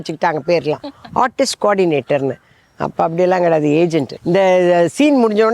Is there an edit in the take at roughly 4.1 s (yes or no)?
yes